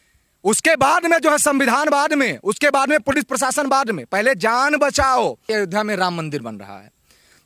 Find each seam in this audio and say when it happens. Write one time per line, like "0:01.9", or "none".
0:05.4